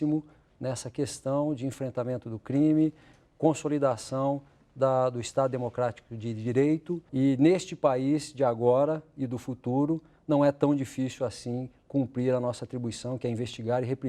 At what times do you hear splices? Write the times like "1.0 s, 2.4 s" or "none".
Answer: 7.0 s